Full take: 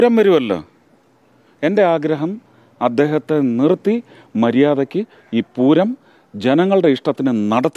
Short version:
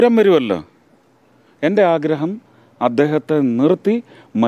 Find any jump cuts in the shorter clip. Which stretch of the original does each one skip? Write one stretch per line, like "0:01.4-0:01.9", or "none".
none